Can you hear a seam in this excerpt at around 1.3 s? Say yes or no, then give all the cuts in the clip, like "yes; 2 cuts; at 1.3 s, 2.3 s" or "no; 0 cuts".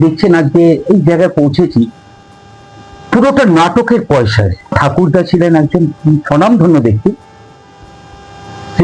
no; 1 cut; at 4.7 s